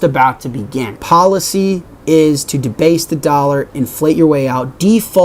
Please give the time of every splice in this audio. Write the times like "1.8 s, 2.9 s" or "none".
none